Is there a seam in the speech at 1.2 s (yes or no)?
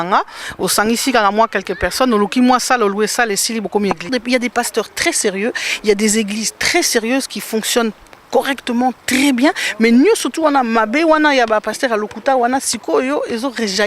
no